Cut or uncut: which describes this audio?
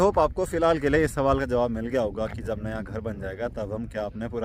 uncut